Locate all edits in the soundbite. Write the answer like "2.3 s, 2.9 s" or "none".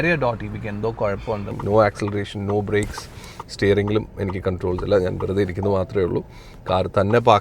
1.5 s